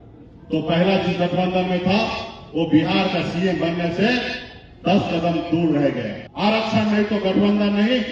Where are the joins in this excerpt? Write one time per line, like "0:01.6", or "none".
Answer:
0:06.2

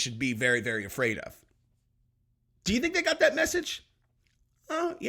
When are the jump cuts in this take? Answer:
none

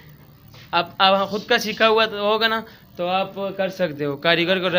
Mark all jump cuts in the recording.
none

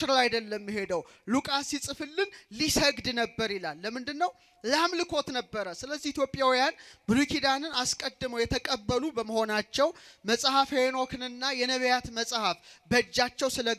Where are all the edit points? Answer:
none

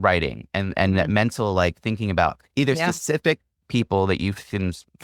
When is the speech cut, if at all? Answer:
none

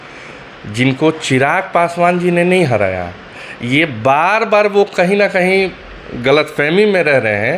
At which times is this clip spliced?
none

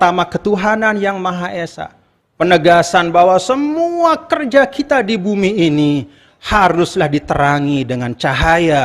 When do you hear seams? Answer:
none

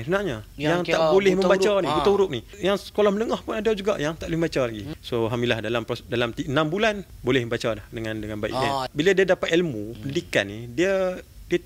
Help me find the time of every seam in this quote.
0:02.5
0:04.9
0:07.1
0:08.9

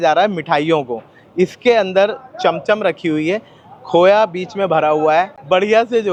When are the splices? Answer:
none

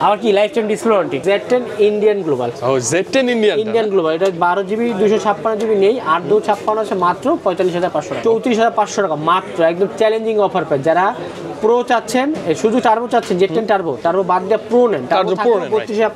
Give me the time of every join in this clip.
0:01.2
0:08.1

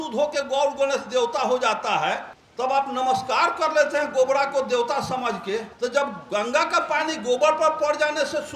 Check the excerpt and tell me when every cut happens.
0:02.4
0:05.7

